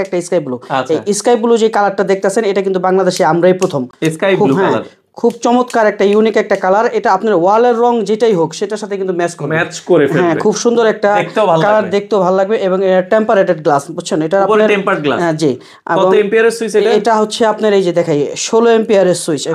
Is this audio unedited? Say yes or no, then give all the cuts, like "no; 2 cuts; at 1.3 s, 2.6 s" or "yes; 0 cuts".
yes; 0 cuts